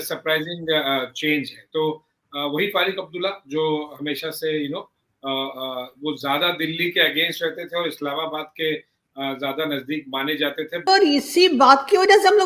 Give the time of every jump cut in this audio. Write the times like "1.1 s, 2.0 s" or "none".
10.8 s

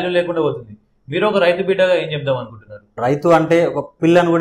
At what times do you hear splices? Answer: 3.0 s

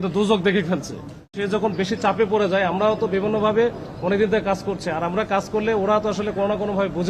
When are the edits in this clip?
1.4 s

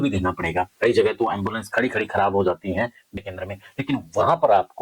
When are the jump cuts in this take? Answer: 3.2 s

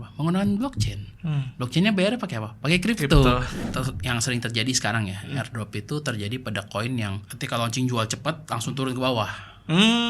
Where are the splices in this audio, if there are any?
3.5 s, 7.3 s

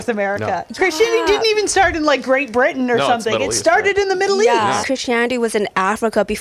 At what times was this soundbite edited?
4.8 s

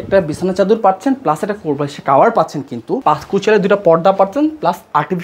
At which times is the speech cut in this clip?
3.0 s

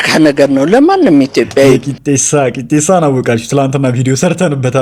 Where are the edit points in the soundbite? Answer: none

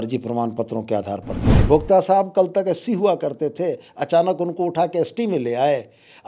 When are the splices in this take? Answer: 1.4 s

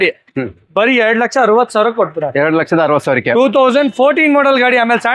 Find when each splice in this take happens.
none

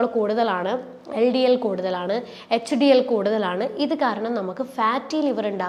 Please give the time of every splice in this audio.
none

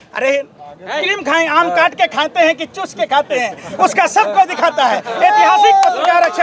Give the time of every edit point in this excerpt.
1.1 s

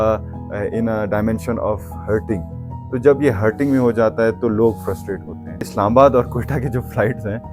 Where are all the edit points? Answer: 5.7 s

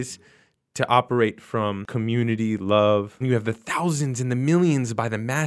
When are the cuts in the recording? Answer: 1.9 s, 3.2 s

